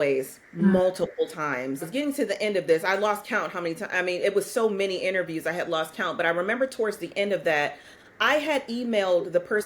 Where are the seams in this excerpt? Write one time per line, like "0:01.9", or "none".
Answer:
0:01.9